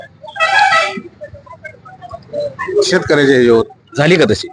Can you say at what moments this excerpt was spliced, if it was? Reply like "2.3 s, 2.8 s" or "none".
none